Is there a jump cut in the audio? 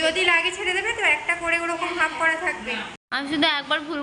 yes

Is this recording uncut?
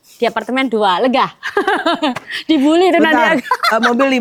yes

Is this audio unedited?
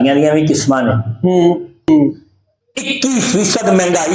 no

